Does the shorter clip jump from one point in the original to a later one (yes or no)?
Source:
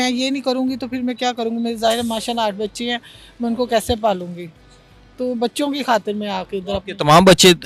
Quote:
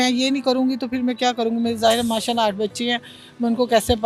no